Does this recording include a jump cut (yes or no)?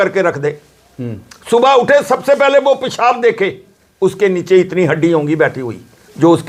no